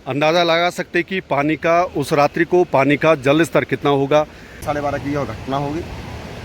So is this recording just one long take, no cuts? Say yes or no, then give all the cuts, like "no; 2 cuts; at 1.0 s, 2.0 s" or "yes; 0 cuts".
no; 1 cut; at 4.6 s